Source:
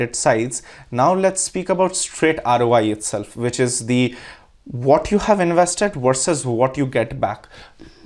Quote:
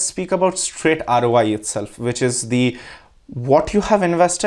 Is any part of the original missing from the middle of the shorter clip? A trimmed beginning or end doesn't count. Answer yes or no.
no